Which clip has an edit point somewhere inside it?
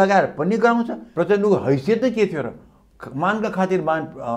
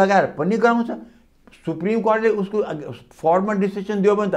first; 1 cut; at 1.1 s

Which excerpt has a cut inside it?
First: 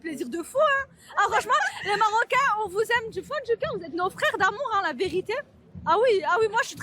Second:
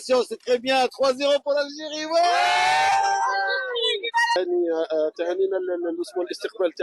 second; 1 cut; at 4.4 s

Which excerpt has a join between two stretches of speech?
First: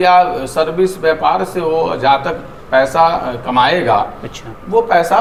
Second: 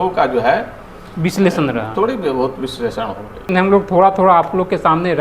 second; 1 cut; at 3.5 s

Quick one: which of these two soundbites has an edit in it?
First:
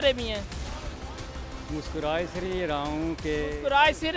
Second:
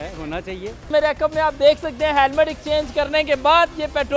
second; 1 cut; at 0.9 s

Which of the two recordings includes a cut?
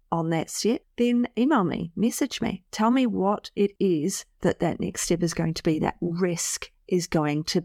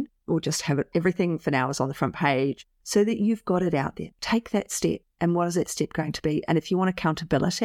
second; 2 cuts; at 2.6 s, 4.1 s

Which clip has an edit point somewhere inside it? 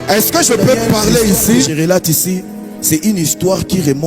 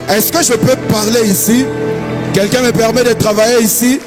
first; 1 cut; at 1.7 s

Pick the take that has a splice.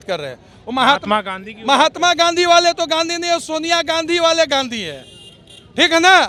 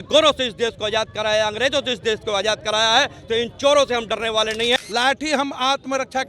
second; 1 cut; at 4.8 s

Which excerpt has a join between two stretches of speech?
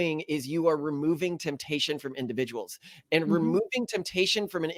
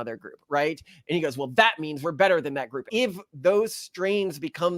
second; 1 cut; at 2.9 s

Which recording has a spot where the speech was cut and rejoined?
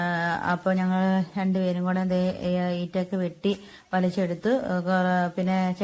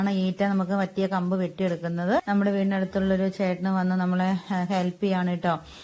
second; 1 cut; at 2.2 s

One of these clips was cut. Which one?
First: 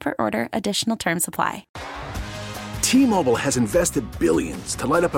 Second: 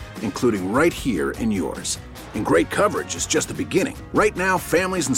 first; 1 cut; at 1.7 s

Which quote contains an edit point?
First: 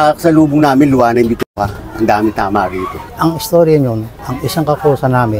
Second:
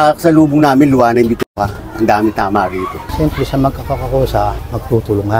second; 1 cut; at 3.1 s

